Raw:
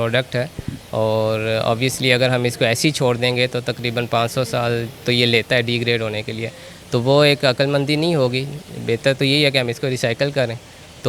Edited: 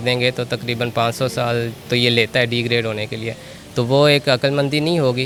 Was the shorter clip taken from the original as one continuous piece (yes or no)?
yes